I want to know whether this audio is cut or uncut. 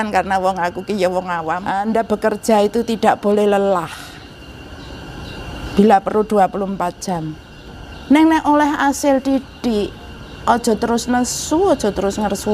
cut